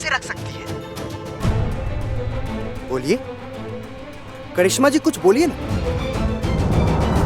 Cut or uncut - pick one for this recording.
cut